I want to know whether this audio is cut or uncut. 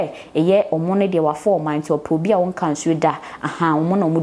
uncut